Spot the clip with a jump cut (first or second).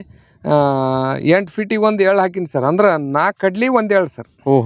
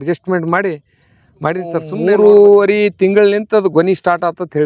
second